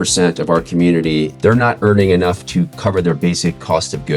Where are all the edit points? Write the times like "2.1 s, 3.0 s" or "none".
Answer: 1.3 s, 2.7 s